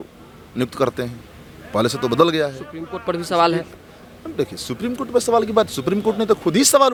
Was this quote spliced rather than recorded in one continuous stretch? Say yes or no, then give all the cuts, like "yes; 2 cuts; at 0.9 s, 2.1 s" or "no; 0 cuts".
no; 0 cuts